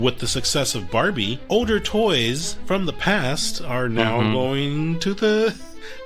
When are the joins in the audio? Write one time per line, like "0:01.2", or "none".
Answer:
0:01.4